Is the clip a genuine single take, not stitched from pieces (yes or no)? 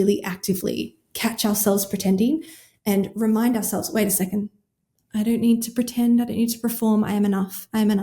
yes